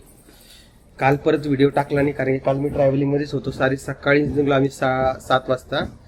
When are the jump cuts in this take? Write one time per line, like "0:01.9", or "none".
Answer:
none